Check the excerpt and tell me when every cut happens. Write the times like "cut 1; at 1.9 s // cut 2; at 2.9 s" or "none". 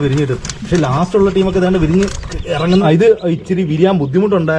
cut 1; at 2.8 s